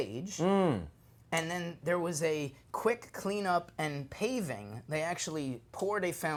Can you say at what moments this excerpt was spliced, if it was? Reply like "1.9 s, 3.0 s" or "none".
none